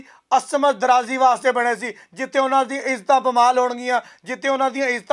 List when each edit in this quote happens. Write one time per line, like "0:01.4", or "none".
none